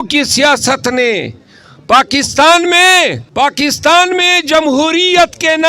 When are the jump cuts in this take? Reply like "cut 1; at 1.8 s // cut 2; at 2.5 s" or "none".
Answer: cut 1; at 3.2 s